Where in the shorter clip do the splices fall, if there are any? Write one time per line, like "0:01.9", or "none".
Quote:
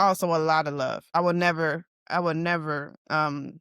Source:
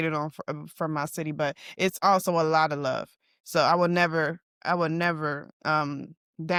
0:01.1

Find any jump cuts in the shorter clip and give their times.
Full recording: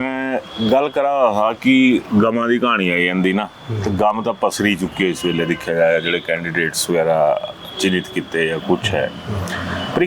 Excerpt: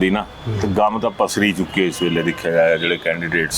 none

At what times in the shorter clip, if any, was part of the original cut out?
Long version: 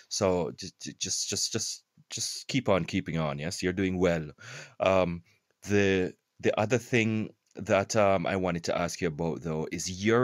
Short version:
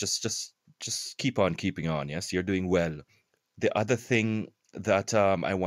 0:03.4

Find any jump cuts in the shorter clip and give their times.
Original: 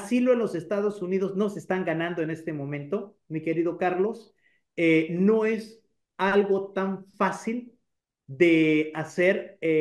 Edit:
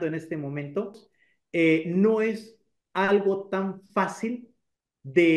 0:01.1

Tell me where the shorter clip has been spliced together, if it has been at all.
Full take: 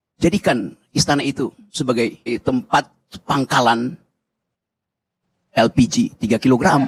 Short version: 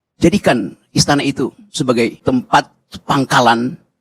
0:02.2

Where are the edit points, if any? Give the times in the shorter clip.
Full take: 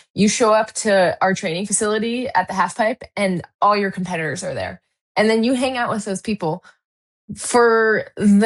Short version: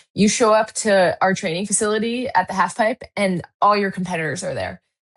none

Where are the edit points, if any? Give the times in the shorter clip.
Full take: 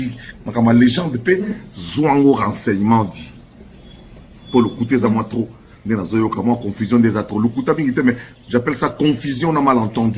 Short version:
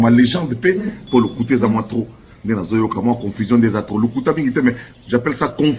0:01.0

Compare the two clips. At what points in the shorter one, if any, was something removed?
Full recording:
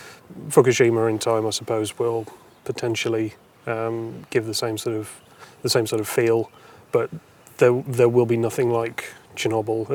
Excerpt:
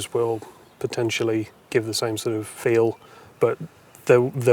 0:01.6
0:02.6

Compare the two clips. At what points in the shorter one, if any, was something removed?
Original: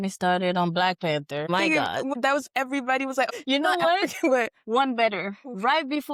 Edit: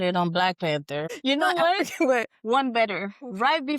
0:01.1

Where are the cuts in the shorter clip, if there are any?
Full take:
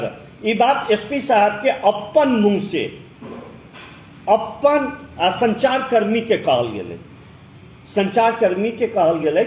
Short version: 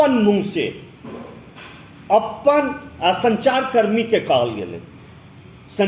none

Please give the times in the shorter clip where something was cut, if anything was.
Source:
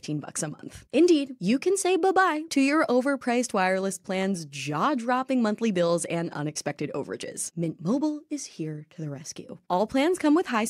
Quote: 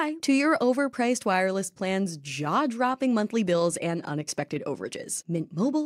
none

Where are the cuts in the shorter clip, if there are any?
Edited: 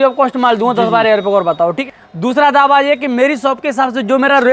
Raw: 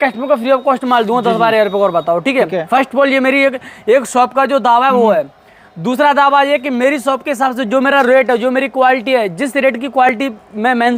0:01.8

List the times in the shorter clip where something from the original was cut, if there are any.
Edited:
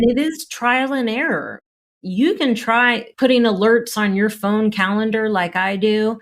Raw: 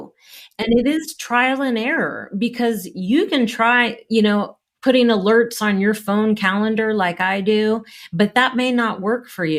0:01.9
0:03.0

